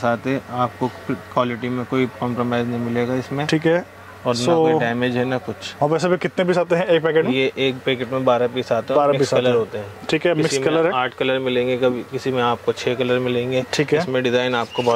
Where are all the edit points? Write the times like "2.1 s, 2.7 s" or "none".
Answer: none